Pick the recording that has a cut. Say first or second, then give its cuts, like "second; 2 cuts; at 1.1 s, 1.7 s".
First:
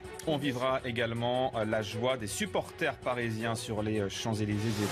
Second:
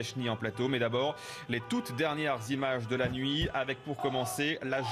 first; 1 cut; at 1.9 s